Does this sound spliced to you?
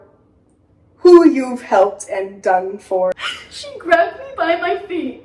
yes; 1 cut; at 3.1 s

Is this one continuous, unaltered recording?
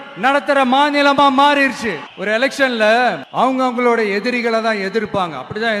no; 2 cuts; at 2.1 s, 3.2 s

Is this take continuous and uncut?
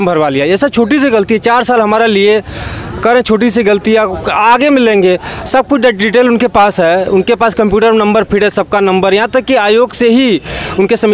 yes; 0 cuts

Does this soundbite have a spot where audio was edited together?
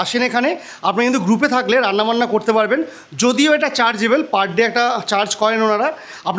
no; 0 cuts

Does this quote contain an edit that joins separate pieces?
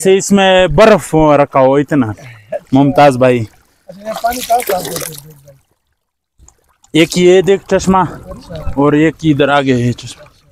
no; 0 cuts

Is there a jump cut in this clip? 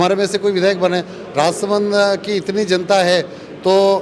no; 0 cuts

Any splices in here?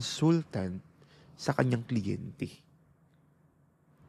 no; 0 cuts

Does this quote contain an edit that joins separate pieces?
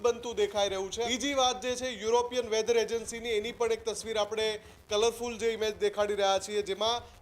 yes; 1 cut; at 1.1 s

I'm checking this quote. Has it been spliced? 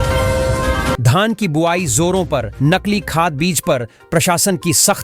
yes; 1 cut; at 1.0 s

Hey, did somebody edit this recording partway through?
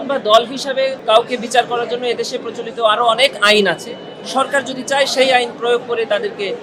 yes; 1 cut; at 1.0 s

